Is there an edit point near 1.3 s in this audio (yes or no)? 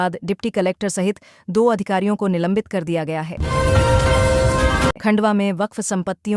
no